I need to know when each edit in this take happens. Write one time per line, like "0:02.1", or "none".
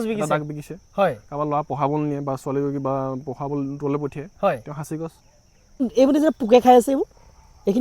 0:05.8